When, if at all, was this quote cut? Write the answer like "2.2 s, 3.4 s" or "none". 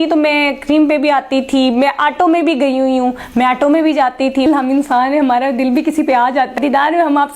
4.5 s, 6.5 s